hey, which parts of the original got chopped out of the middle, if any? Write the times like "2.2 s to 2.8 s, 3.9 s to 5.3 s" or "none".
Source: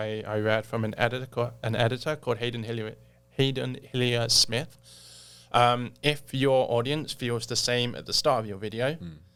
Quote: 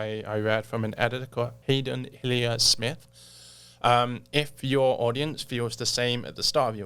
1.6 s to 3.3 s